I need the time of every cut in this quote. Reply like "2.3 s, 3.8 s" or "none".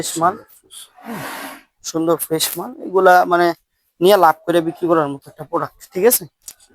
none